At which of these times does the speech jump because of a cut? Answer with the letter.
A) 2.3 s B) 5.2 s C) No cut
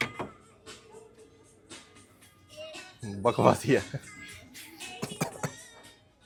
C